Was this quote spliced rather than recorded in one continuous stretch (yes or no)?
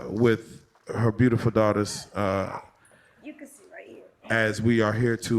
yes